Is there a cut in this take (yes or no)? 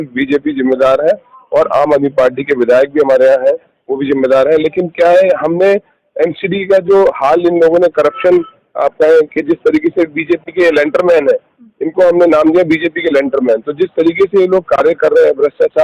no